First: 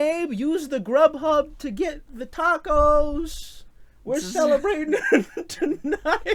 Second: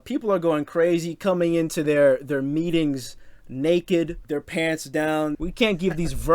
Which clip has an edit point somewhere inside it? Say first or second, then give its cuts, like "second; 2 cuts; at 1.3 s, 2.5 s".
second; 2 cuts; at 4.2 s, 5.4 s